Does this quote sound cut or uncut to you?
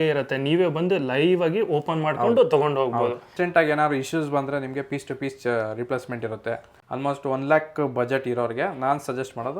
cut